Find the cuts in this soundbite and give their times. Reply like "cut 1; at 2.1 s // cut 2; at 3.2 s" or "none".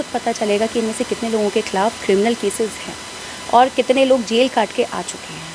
none

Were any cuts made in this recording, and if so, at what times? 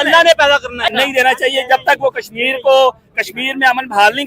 cut 1; at 0.9 s

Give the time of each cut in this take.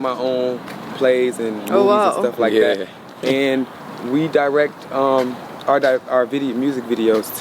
none

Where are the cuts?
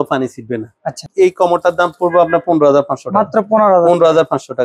cut 1; at 1.1 s

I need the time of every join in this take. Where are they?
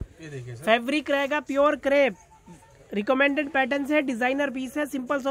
none

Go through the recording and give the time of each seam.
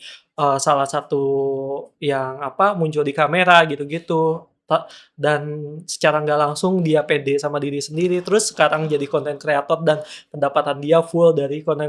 none

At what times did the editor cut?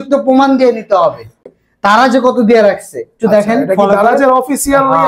cut 1; at 1.4 s

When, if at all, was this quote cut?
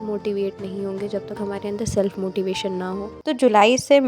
cut 1; at 3.1 s

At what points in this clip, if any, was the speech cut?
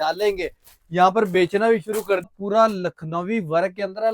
cut 1; at 2.3 s

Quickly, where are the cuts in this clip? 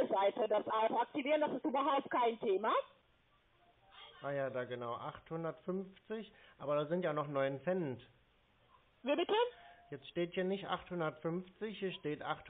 cut 1; at 3.0 s

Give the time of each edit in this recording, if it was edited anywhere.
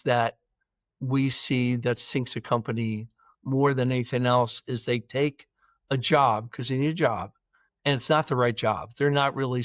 none

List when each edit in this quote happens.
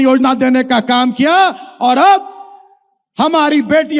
none

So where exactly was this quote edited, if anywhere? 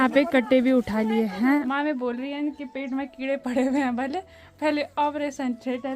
cut 1; at 1.7 s

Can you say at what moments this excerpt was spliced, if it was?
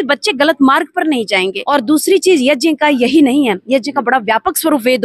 cut 1; at 1.6 s

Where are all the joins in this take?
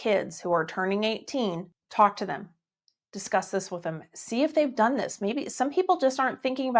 cut 1; at 1.8 s

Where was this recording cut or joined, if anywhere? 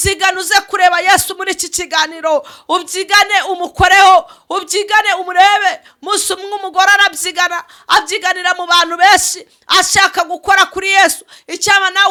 none

